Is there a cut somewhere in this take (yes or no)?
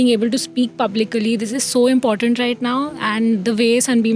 no